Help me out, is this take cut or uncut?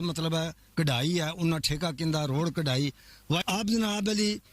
cut